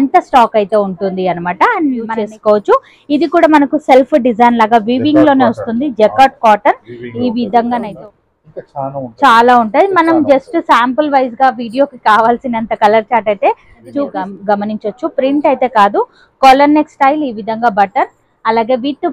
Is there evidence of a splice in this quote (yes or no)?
yes